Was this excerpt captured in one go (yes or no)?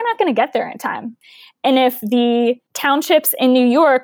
no